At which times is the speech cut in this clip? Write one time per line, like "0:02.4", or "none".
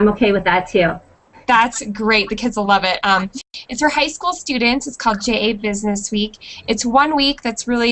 0:04.4